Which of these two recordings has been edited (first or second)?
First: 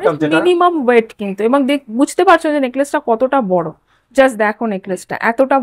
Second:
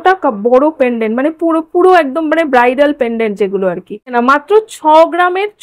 second